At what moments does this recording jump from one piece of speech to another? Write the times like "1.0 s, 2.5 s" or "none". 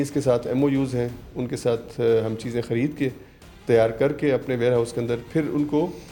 none